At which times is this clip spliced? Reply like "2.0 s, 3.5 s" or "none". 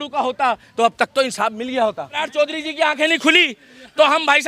2.2 s